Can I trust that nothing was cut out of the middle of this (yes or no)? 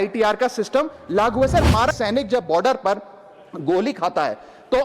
no